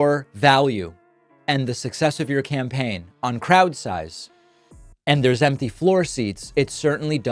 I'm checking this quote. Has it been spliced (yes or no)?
no